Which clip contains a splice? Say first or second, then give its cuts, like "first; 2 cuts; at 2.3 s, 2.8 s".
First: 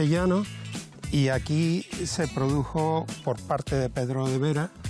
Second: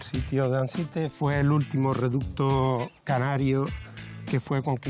second; 1 cut; at 1.1 s